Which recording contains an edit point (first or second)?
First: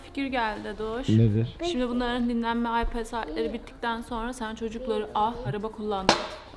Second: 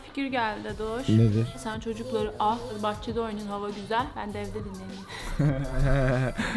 second